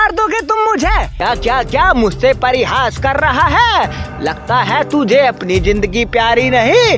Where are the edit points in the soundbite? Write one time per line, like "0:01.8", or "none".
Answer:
0:01.2